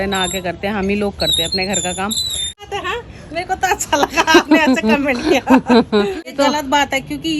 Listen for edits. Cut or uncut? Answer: cut